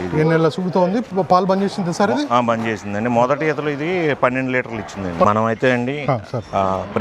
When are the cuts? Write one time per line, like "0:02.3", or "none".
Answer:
0:05.2